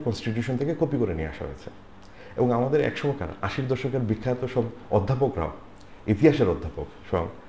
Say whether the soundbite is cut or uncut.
uncut